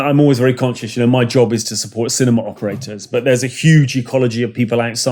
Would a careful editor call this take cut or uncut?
uncut